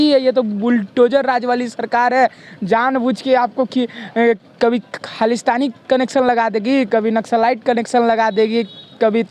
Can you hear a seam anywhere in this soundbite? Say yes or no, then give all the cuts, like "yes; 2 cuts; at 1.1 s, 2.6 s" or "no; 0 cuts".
no; 0 cuts